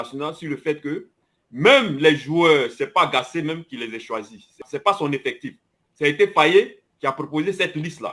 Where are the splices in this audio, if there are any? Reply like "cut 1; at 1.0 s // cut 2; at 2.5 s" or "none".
cut 1; at 4.6 s